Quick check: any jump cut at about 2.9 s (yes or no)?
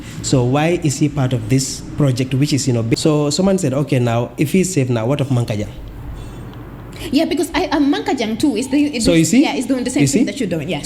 yes